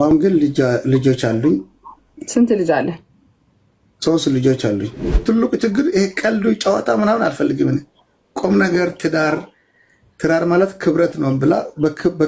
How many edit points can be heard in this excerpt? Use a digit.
1